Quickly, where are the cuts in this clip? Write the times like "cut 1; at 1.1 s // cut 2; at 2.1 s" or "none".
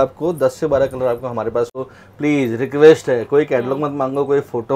cut 1; at 1.9 s